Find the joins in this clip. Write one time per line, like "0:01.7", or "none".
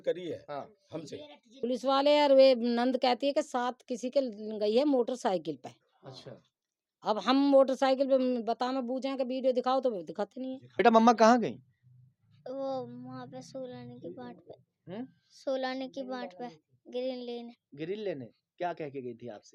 0:01.5
0:10.6

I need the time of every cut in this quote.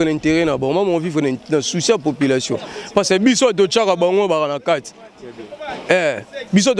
none

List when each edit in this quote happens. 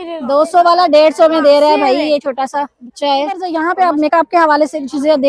0:03.5

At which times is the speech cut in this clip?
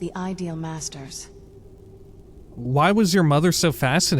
0:02.5

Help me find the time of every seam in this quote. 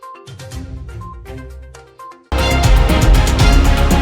0:02.3

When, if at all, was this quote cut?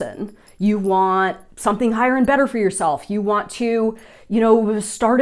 none

